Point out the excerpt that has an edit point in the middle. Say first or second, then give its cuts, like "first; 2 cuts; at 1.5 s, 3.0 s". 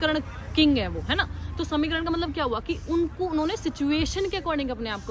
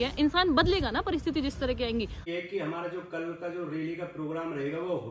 second; 1 cut; at 2.3 s